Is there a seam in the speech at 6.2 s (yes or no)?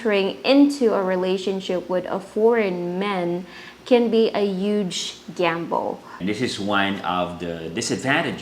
yes